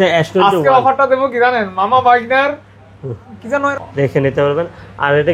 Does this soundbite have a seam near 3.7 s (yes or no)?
yes